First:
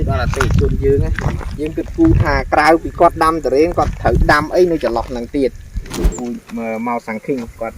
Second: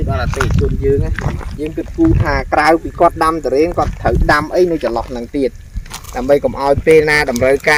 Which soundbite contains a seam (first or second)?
first